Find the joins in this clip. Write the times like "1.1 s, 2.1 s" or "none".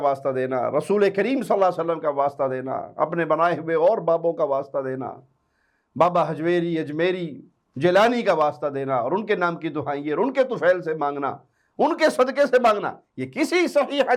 none